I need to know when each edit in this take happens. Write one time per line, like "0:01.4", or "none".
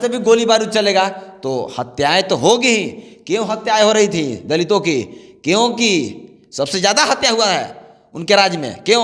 none